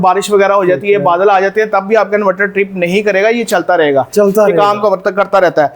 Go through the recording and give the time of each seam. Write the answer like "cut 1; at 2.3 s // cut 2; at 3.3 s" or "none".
none